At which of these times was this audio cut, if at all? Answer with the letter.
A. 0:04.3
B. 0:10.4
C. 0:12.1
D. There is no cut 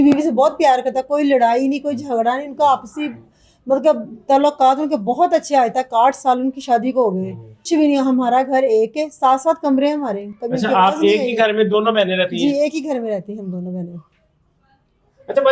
D